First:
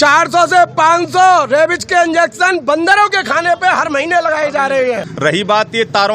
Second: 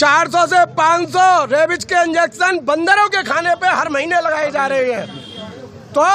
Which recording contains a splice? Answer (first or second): first